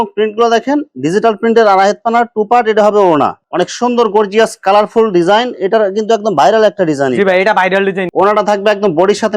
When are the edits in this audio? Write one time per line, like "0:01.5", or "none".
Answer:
0:03.4
0:08.0

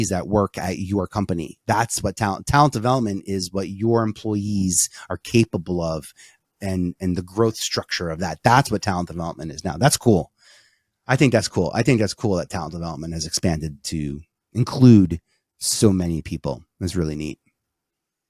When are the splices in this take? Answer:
none

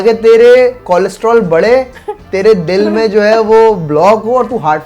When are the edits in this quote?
none

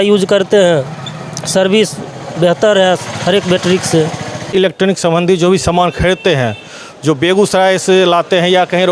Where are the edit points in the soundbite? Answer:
0:04.5

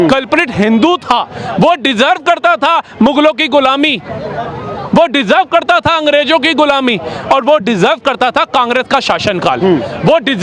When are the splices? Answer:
none

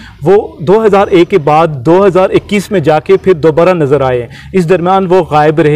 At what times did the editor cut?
none

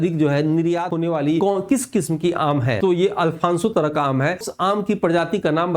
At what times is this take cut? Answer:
0:01.0
0:02.8
0:04.5

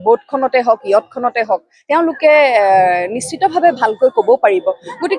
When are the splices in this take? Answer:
none

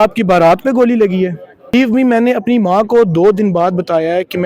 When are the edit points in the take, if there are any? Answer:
0:01.7

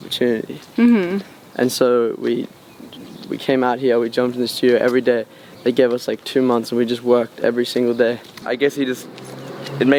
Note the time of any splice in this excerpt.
0:08.3

